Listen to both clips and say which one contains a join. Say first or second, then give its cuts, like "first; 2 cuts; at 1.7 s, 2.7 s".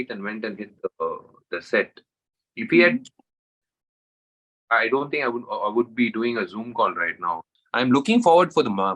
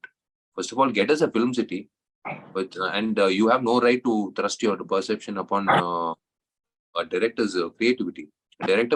first; 1 cut; at 7.5 s